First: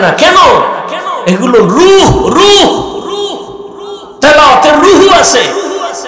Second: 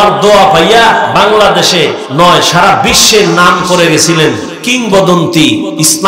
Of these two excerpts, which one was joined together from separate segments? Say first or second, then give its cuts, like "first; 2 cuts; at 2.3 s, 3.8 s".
second; 2 cuts; at 2.0 s, 4.6 s